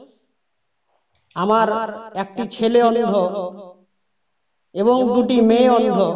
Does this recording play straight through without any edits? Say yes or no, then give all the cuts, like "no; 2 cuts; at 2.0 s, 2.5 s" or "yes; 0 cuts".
yes; 0 cuts